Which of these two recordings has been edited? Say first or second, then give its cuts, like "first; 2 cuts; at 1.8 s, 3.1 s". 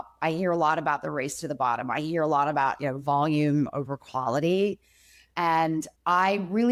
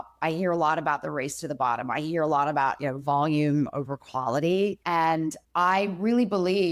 second; 1 cut; at 4.8 s